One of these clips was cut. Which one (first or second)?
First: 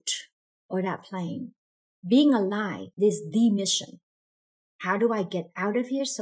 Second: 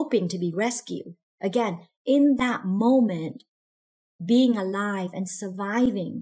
first